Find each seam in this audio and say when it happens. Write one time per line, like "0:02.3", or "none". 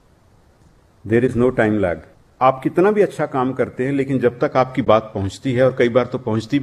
0:02.2